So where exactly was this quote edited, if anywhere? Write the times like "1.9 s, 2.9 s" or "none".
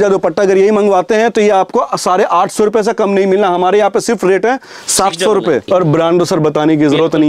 5.7 s